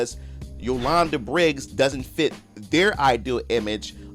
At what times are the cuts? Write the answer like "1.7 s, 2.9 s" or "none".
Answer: none